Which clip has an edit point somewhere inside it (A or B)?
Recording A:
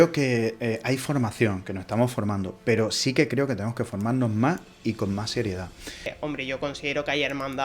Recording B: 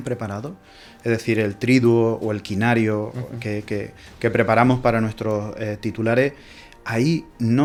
A